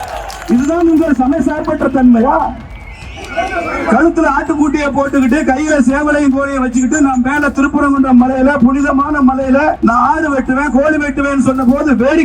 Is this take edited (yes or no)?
yes